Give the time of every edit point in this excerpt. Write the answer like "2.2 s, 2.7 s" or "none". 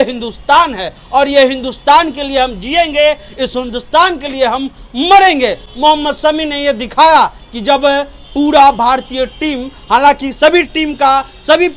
none